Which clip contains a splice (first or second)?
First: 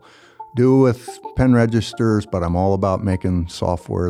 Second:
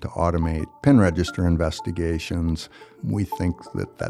second